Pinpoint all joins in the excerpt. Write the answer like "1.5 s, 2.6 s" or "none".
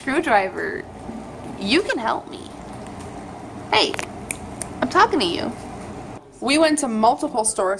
none